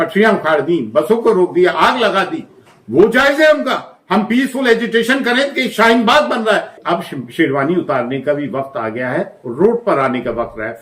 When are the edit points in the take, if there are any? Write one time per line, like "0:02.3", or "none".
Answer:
0:06.7